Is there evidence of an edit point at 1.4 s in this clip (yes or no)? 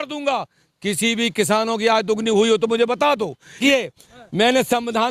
no